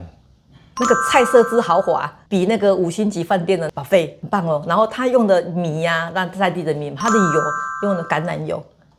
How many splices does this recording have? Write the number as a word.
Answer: zero